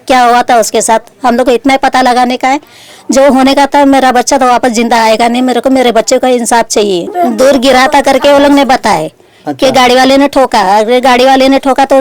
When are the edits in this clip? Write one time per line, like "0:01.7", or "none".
0:07.1